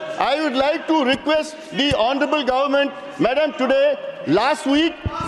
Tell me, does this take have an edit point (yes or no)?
no